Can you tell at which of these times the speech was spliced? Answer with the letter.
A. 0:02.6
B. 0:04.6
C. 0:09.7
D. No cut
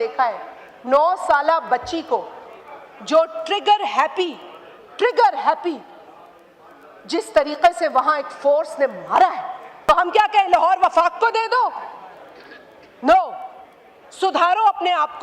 C